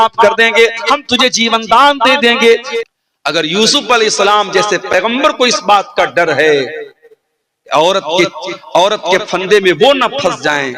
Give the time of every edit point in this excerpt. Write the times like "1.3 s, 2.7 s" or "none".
2.7 s